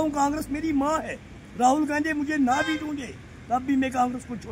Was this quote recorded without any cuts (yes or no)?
yes